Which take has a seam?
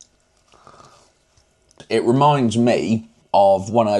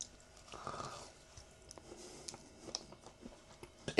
first; 2 cuts; at 1.7 s, 3.1 s

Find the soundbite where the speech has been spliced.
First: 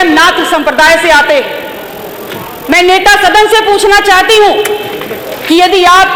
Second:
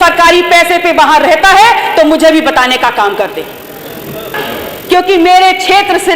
second; 1 cut; at 4.3 s

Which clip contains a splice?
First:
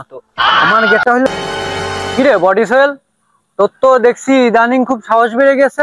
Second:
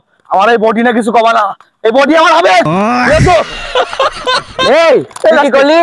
first; 1 cut; at 1.3 s

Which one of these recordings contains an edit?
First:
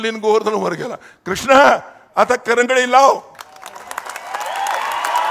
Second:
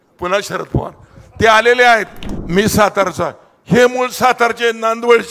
second; 1 cut; at 2.3 s

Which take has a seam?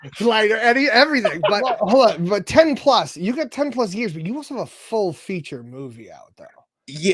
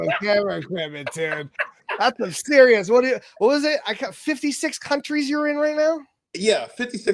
first; 1 cut; at 1.8 s

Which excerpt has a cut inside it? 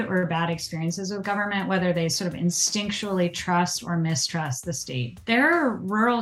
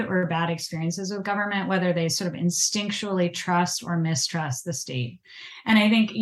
first; 1 cut; at 5.1 s

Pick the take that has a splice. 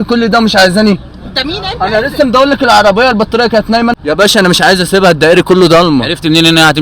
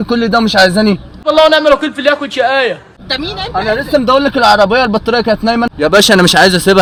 first; 2 cuts; at 1.1 s, 6.0 s

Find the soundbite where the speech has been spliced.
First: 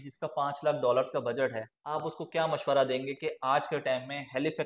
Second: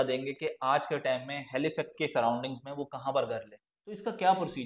second; 1 cut; at 3.7 s

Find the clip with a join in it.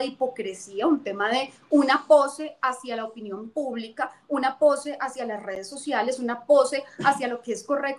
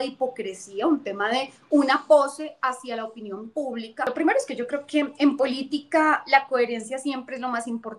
second; 1 cut; at 4.1 s

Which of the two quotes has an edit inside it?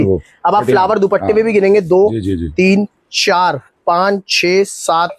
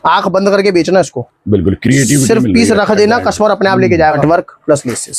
second; 1 cut; at 4.2 s

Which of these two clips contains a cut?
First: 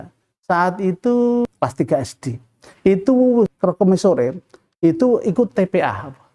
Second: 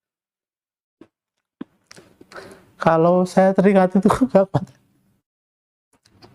first; 2 cuts; at 1.5 s, 3.5 s

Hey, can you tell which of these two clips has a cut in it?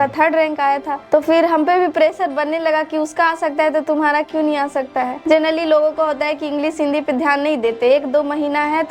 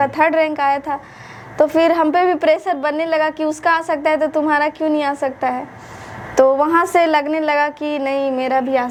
first; 2 cuts; at 0.9 s, 5.1 s

